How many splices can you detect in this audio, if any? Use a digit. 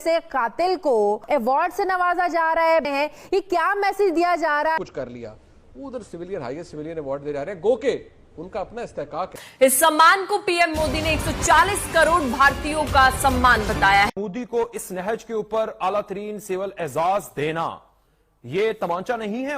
3